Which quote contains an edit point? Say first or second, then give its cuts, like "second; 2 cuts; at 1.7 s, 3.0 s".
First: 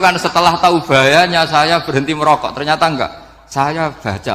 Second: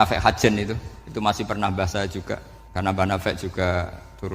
second; 1 cut; at 2.6 s